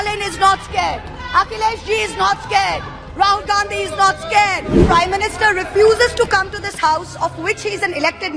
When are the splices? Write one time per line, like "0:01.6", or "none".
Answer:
0:04.8